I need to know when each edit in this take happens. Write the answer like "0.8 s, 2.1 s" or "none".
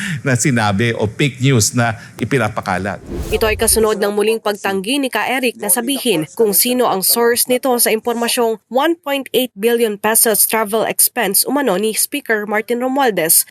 3.1 s